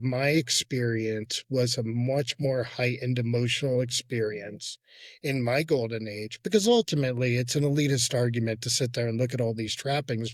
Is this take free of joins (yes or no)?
yes